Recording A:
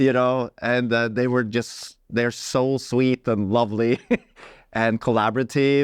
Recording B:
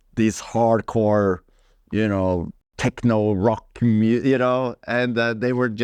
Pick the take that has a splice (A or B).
B